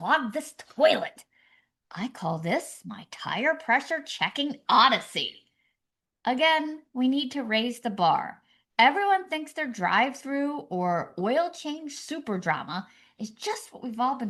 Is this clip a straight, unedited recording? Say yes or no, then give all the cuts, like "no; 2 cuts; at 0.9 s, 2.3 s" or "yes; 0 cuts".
yes; 0 cuts